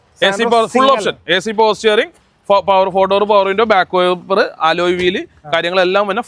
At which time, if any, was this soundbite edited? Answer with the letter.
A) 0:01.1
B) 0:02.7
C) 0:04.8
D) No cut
D